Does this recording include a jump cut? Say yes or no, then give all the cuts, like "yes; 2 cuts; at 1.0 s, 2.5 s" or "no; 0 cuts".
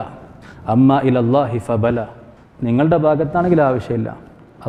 no; 0 cuts